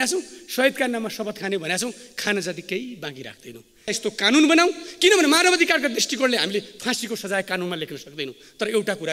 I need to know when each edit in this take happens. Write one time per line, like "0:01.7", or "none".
0:03.9

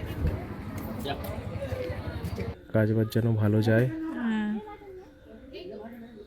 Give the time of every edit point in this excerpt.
0:02.6

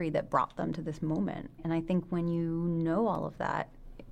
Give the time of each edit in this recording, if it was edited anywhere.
0:01.6

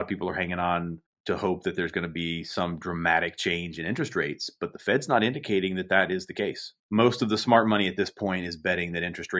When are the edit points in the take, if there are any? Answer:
0:01.1
0:06.7

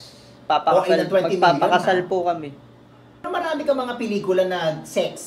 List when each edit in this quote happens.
0:03.3

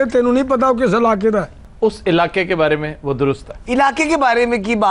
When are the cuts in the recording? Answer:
0:01.6

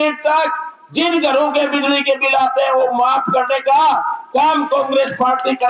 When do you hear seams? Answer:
none

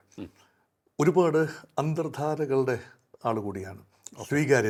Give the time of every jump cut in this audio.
none

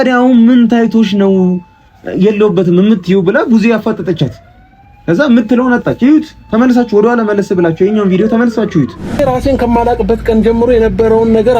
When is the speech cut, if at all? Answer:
0:09.2

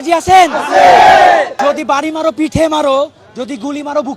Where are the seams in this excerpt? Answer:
0:01.6

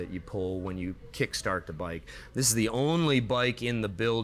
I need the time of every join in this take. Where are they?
none

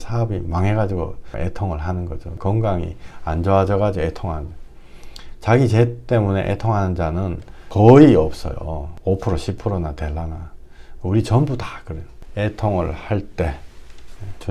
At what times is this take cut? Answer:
none

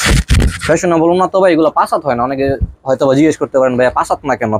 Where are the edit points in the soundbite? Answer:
none

